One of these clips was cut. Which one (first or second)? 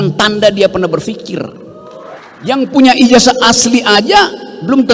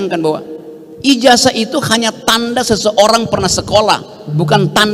first